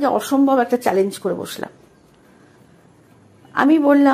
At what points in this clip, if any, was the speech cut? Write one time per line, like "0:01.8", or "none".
none

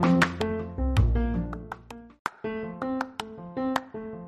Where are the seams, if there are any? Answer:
0:02.1

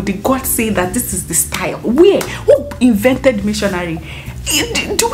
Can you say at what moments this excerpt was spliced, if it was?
none

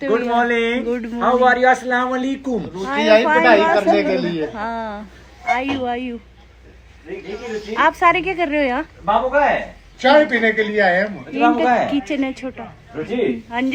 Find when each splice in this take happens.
none

